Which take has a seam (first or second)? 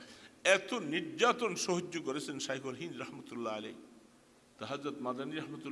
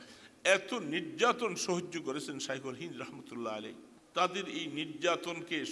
first